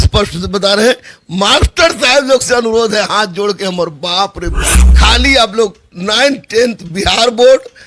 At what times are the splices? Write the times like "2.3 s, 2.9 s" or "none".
4.6 s